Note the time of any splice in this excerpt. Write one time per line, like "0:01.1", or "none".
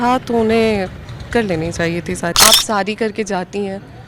0:02.3